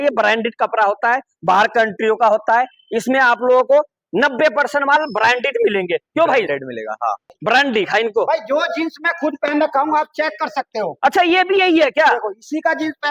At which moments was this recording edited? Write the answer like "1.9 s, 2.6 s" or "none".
7.3 s